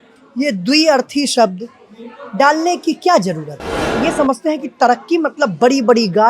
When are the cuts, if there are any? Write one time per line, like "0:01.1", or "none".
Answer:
0:03.9